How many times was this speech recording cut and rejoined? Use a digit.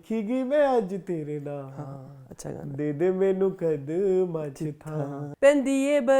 2